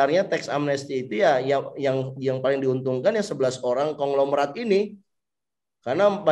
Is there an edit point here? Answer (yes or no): no